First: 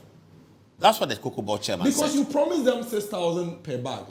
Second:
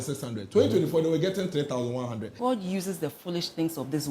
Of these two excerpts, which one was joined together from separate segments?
second; 1 cut; at 2.2 s

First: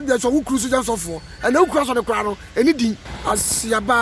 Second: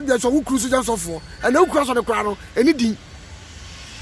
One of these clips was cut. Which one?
first; 1 cut; at 3.1 s

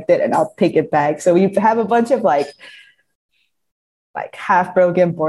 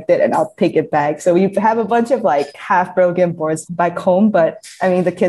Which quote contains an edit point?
second; 2 cuts; at 2.6 s, 3.6 s

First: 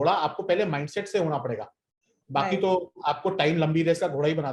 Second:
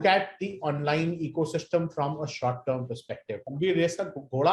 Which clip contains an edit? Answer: second; 1 cut; at 3.5 s

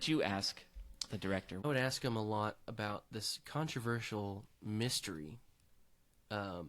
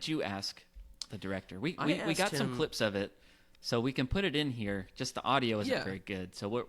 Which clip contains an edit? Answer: first; 1 cut; at 1.6 s

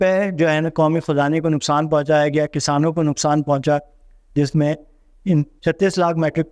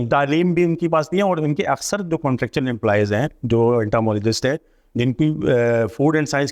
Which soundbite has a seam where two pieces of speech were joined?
first; 1 cut; at 5.5 s

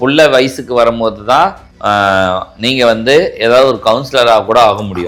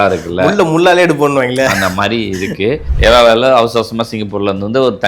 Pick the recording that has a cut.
second; 1 cut; at 2.9 s

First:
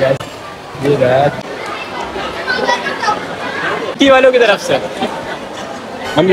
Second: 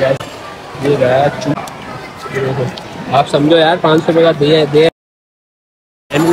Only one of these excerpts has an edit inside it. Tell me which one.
first; 2 cuts; at 1.4 s, 4.0 s

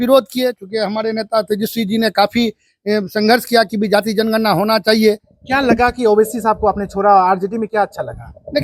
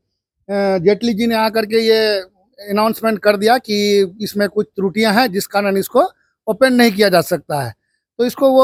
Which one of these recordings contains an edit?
first; 1 cut; at 5.3 s

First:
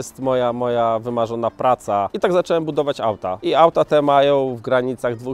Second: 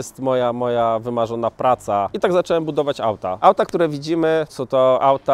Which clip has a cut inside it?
first; 1 cut; at 3.3 s

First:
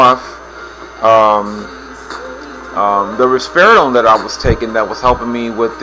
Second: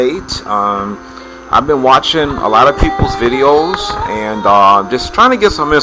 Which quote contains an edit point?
second; 1 cut; at 4.5 s

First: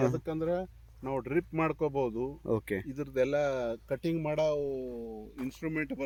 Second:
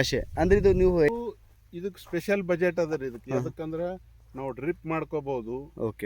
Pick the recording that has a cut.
second; 1 cut; at 1.1 s

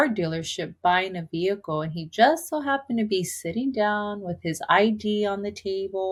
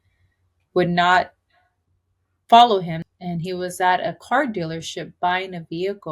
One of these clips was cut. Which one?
second; 1 cut; at 3.0 s

